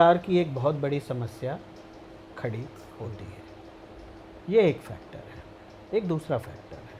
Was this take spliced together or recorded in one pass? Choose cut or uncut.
uncut